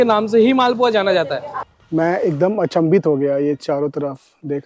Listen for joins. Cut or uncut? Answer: cut